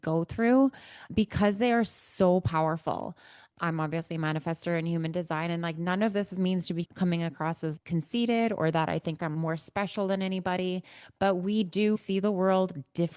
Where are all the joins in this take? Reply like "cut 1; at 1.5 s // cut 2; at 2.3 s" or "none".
none